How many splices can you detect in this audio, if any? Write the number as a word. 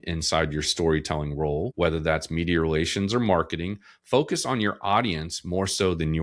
one